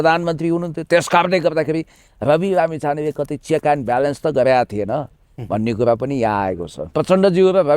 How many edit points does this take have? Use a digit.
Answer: 1